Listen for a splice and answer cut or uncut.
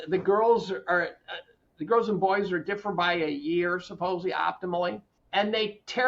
cut